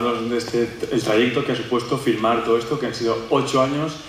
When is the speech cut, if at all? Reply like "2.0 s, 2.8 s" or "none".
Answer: 1.4 s